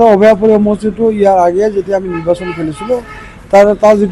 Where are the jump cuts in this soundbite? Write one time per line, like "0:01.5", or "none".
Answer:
none